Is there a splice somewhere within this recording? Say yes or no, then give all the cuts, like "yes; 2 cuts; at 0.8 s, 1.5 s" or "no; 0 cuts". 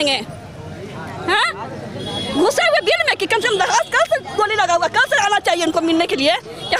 no; 0 cuts